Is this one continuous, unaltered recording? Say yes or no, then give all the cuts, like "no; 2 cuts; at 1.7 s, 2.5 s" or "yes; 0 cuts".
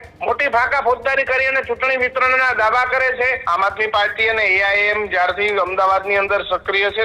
no; 1 cut; at 3.4 s